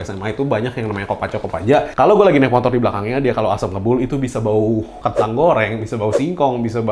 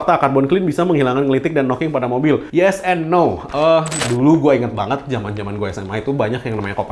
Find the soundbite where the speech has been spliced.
second; 1 cut; at 4.0 s

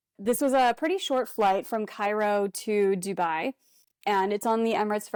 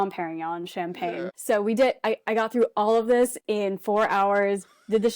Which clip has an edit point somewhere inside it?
second; 1 cut; at 1.3 s

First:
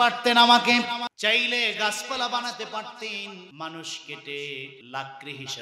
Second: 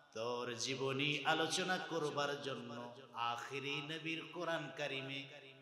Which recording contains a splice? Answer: first; 3 cuts; at 1.1 s, 3.5 s, 4.8 s

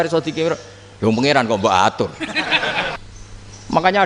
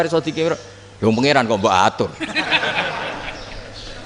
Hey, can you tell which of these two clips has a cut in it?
first; 1 cut; at 3.0 s

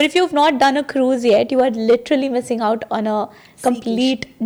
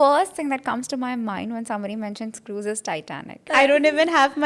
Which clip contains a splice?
second; 1 cut; at 3.4 s

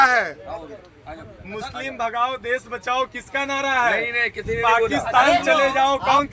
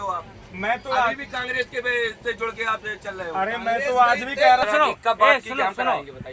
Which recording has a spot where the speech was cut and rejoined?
second; 1 cut; at 4.6 s

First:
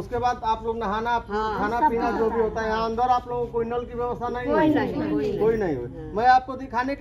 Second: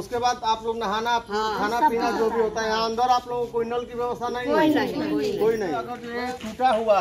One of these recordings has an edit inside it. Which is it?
second; 1 cut; at 6.0 s

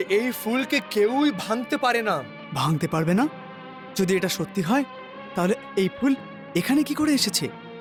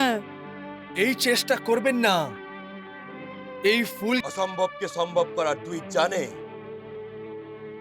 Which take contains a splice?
second; 1 cut; at 4.2 s

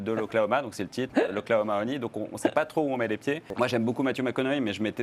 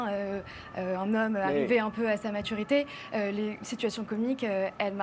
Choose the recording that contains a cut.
first; 1 cut; at 3.5 s

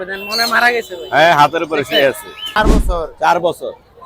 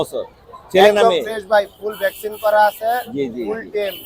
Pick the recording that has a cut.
first; 1 cut; at 2.6 s

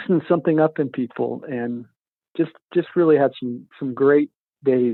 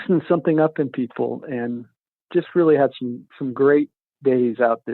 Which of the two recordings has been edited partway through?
second; 1 cut; at 2.2 s

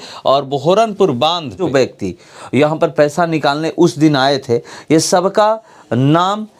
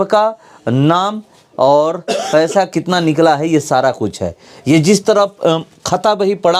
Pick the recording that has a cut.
first; 1 cut; at 1.7 s

